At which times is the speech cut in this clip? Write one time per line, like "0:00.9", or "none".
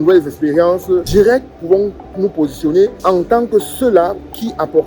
0:01.1
0:03.0

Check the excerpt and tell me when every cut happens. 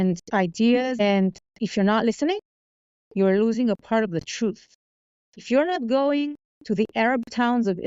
0:01.0

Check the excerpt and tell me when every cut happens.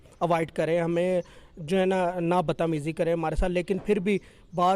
none

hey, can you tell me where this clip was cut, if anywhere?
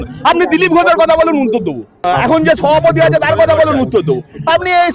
0:02.0

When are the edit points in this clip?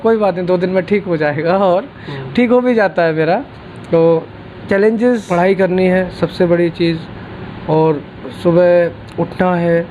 0:05.2

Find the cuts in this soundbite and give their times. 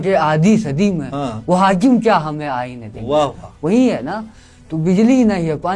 none

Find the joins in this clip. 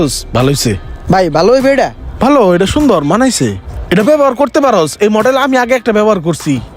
0:00.9

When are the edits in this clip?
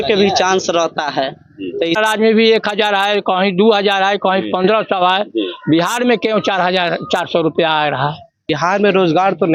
0:02.0
0:08.5

